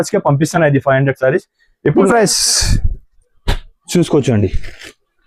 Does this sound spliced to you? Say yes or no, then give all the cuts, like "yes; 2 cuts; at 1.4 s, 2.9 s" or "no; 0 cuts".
yes; 1 cut; at 2.1 s